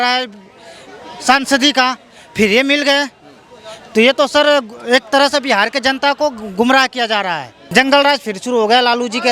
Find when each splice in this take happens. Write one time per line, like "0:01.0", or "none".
0:07.5